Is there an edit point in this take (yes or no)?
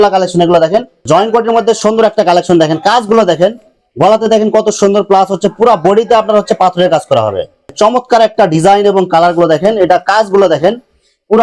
yes